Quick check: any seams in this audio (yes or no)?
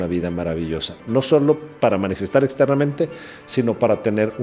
yes